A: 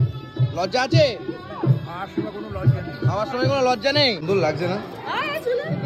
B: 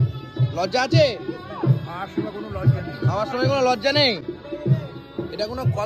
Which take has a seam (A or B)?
A